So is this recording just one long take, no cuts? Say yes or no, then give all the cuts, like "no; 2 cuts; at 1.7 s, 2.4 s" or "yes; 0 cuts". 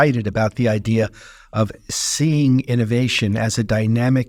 yes; 0 cuts